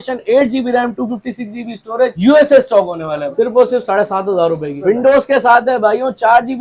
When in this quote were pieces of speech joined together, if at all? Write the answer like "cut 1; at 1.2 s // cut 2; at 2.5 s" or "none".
cut 1; at 3.2 s // cut 2; at 4.8 s